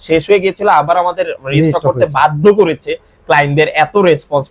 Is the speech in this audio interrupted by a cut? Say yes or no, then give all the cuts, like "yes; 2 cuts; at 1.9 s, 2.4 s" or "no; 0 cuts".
no; 0 cuts